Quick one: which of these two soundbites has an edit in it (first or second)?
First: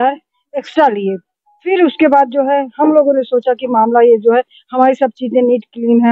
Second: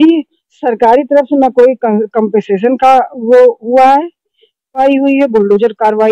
second